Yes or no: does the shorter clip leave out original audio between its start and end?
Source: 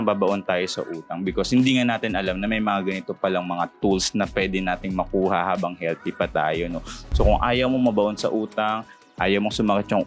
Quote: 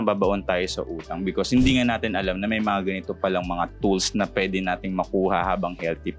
no